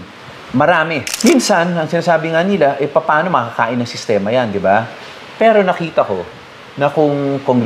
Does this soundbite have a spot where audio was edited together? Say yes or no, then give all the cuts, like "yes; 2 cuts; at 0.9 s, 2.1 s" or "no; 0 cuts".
yes; 1 cut; at 1.1 s